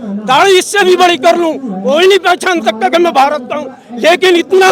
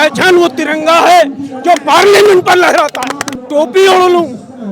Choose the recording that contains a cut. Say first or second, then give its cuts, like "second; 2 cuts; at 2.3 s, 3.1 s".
second; 1 cut; at 3.3 s